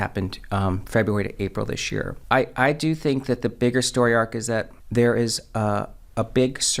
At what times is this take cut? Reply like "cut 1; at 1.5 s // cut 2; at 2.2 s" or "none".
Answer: cut 1; at 2.2 s // cut 2; at 4.8 s